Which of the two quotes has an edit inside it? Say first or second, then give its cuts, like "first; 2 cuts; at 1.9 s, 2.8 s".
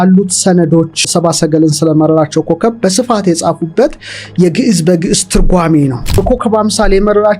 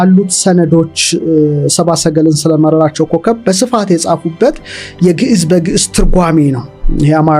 first; 2 cuts; at 1.0 s, 6.2 s